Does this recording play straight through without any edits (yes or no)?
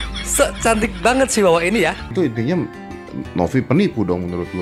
no